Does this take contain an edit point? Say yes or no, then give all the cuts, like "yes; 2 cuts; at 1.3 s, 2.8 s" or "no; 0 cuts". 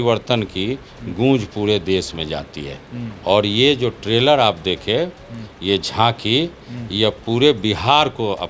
no; 0 cuts